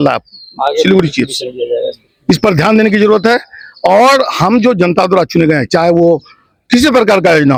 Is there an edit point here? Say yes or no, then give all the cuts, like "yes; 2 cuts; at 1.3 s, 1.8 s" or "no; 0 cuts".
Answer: no; 0 cuts